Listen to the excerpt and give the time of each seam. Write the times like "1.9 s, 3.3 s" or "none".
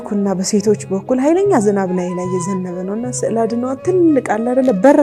none